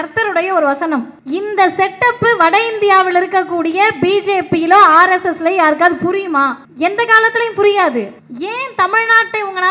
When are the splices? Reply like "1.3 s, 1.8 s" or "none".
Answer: 1.2 s, 6.6 s, 8.2 s